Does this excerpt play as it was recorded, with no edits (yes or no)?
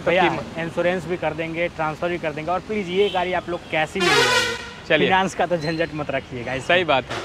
yes